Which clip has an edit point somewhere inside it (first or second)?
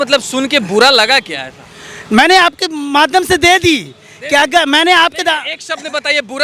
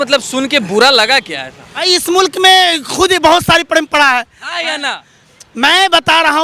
second